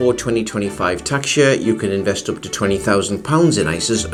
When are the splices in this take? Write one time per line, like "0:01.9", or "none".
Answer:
none